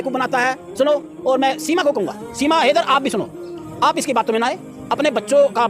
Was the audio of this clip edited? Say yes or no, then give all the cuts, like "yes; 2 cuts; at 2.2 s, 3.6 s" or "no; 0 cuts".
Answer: no; 0 cuts